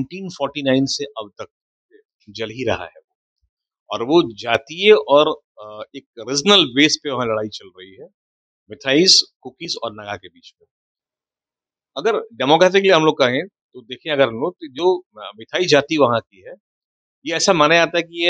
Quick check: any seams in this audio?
no; 0 cuts

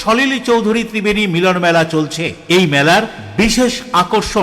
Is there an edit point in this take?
no; 0 cuts

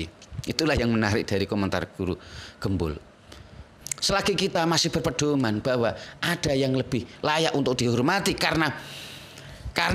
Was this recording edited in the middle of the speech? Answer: yes; 1 cut; at 3.7 s

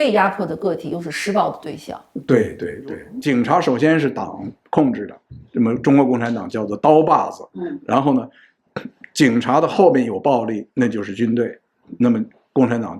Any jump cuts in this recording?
yes; 1 cut; at 3.1 s

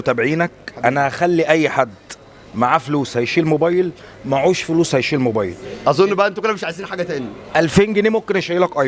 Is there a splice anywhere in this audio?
no; 0 cuts

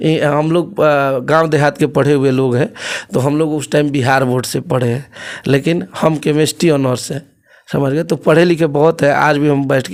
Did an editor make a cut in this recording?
no; 0 cuts

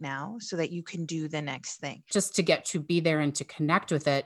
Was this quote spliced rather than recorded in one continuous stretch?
yes; 1 cut; at 2.1 s

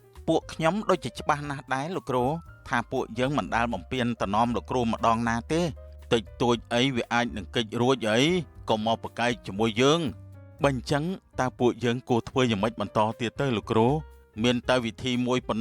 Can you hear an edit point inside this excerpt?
no; 0 cuts

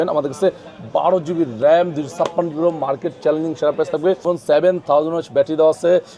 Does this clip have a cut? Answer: yes; 1 cut; at 4.2 s

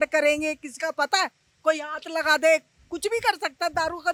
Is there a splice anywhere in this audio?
no; 0 cuts

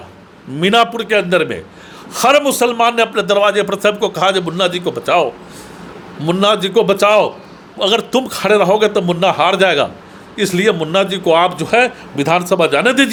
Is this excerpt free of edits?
yes; 0 cuts

